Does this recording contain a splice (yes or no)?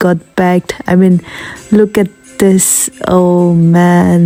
no